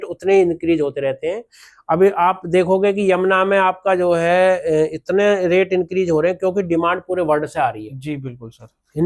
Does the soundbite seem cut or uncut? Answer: uncut